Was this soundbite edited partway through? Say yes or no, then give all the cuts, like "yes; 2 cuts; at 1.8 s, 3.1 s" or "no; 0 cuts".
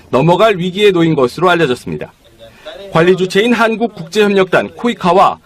no; 0 cuts